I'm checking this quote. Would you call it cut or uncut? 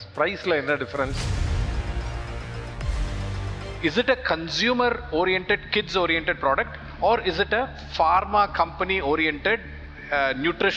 cut